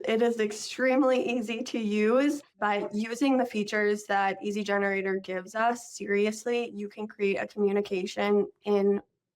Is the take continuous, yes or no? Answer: no